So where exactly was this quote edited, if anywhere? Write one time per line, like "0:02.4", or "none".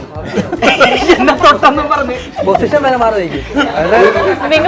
none

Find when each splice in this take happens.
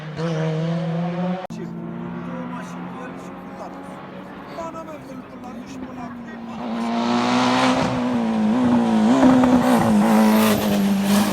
0:01.5

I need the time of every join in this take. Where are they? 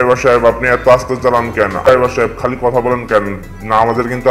0:01.9

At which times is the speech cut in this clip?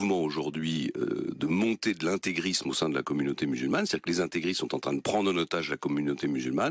0:05.4

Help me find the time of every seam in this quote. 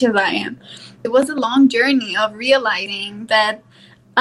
0:01.1

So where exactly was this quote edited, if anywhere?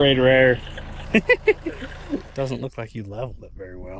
0:01.0
0:02.3

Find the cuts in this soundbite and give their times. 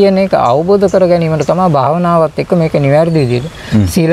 none

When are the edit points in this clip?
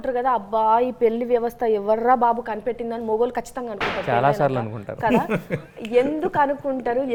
none

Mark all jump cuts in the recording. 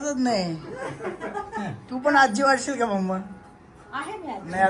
none

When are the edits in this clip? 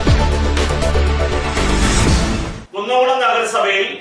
none

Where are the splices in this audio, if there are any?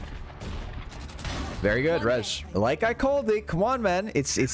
0:02.4

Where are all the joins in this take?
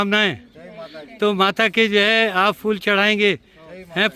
none

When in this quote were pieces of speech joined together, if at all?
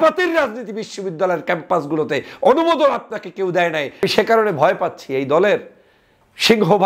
0:04.0

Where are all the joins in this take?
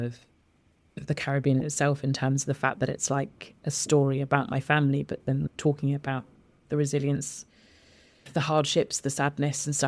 0:05.5
0:08.3

